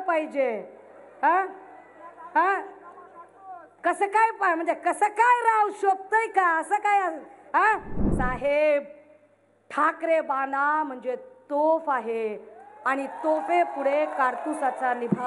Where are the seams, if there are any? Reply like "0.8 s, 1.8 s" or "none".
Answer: 8.1 s